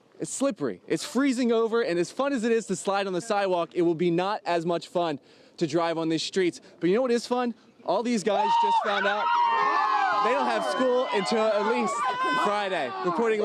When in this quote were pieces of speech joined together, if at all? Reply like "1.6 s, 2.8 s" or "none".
none